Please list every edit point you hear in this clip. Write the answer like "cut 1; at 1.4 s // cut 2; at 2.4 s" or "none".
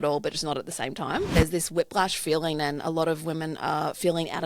cut 1; at 1.3 s